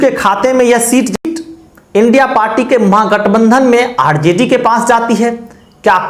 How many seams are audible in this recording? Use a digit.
1